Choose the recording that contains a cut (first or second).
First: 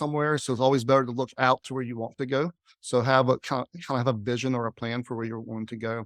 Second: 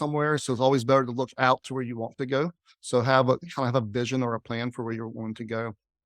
second